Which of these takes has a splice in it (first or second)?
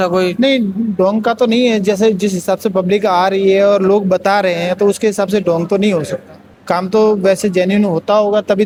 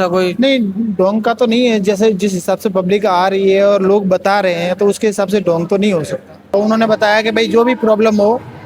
second